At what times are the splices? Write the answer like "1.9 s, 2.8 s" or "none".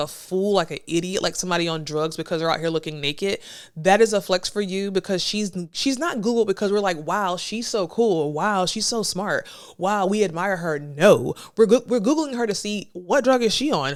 none